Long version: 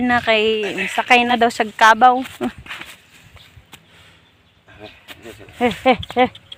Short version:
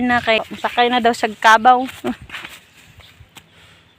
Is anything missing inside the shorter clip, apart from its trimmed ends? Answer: yes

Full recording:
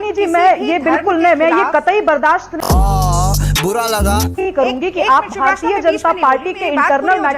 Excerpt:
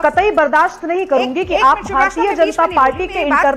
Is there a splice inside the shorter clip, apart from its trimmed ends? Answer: yes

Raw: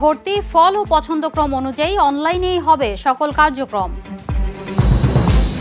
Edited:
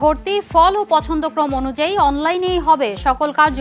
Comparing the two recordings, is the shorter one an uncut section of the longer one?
yes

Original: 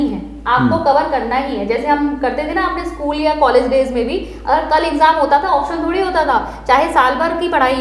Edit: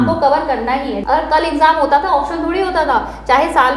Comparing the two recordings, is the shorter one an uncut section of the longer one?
no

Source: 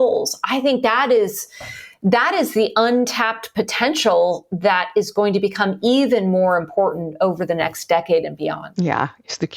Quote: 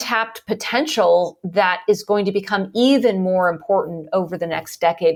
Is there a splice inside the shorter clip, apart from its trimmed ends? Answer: no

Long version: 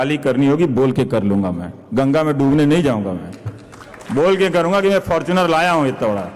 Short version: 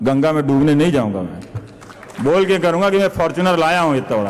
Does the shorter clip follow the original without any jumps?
yes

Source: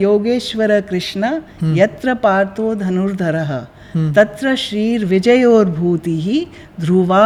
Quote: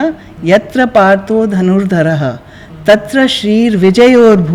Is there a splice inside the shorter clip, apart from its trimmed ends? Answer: no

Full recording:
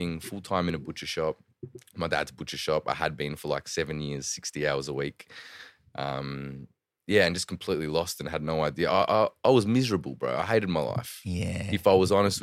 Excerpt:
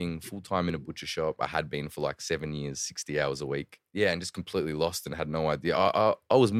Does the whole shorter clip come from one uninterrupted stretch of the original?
no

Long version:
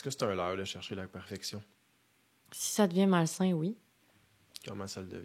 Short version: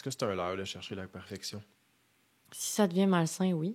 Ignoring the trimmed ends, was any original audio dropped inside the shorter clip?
no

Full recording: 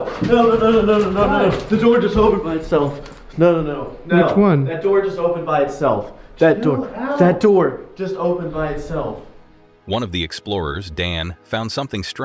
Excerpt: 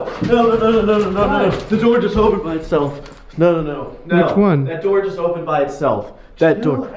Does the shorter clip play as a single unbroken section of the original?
yes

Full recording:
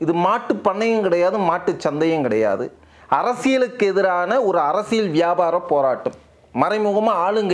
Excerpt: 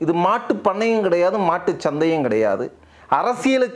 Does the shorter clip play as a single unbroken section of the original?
yes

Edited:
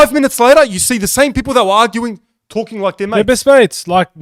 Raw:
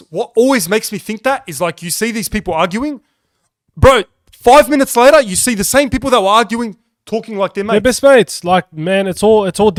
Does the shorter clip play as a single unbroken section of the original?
yes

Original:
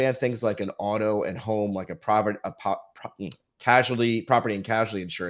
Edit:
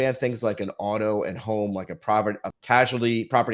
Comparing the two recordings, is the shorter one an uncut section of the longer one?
no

